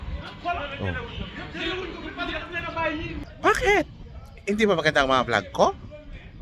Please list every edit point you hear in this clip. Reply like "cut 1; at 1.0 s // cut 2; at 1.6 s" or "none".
cut 1; at 3.2 s